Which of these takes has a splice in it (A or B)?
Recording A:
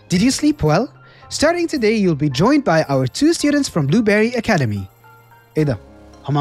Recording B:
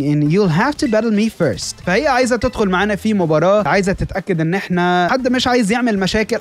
B